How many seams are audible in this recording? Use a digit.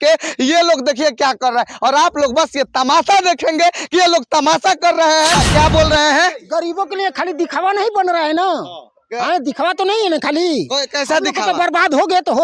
1